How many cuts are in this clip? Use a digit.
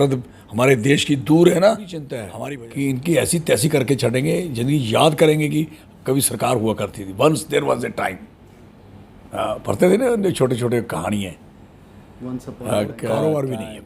2